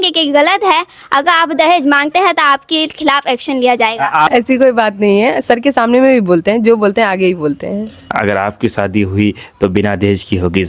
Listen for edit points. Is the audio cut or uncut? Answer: cut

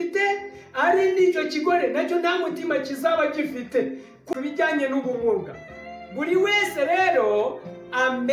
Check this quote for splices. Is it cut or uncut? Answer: cut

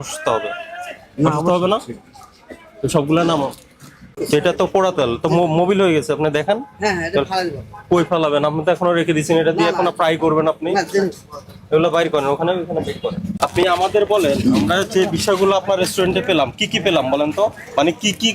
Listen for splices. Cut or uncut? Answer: cut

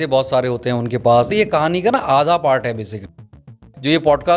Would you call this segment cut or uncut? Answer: cut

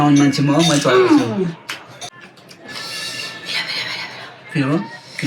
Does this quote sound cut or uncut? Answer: cut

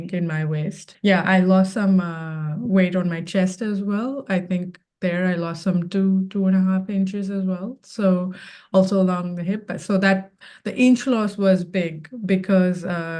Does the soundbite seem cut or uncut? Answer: uncut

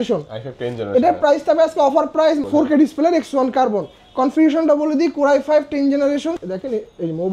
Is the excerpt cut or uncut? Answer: cut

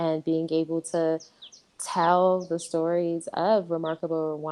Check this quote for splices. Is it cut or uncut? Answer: uncut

